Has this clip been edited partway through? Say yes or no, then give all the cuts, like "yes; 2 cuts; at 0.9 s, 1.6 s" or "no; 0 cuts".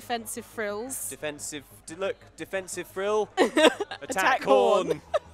no; 0 cuts